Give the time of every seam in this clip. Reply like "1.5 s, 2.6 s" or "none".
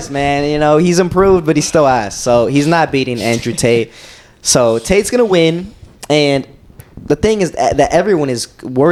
none